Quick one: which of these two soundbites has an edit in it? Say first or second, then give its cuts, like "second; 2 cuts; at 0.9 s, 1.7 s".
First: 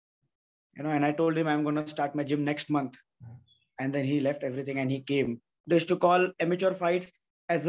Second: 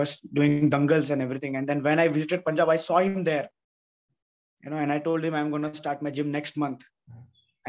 first; 1 cut; at 5.5 s